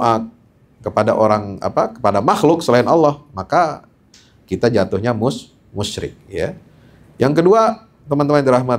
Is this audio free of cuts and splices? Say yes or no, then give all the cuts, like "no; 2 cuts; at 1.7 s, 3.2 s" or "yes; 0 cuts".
yes; 0 cuts